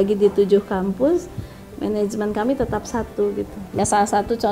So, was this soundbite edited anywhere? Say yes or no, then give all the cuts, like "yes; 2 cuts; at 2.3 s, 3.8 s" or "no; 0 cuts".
yes; 1 cut; at 3.6 s